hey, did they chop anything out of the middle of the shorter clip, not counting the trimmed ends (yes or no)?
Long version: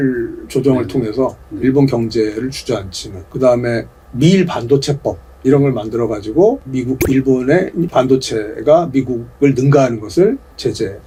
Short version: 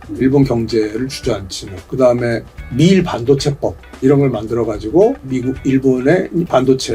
no